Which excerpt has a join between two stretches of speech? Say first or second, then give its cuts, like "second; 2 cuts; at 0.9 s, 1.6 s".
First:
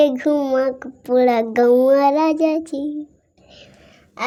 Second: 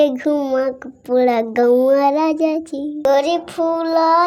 second; 1 cut; at 3.0 s